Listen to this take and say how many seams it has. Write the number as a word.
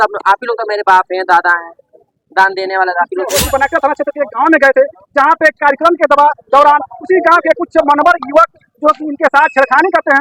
one